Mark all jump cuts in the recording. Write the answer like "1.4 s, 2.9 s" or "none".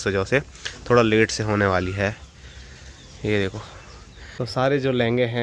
4.3 s